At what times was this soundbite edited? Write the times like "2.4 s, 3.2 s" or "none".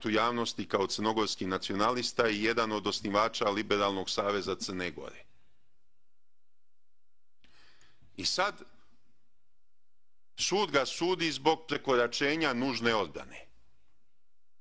1.0 s